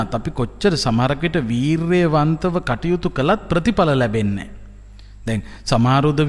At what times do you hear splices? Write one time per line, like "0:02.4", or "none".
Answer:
none